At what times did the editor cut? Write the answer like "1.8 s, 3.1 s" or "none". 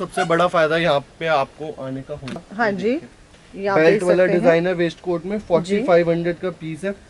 2.4 s